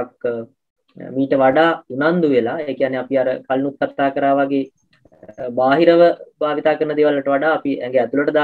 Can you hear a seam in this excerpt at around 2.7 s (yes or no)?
no